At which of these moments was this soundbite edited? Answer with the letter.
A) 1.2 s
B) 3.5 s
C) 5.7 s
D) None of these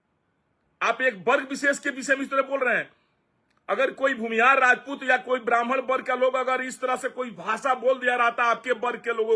D